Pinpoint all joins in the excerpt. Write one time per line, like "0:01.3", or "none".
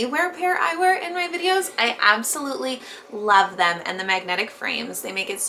none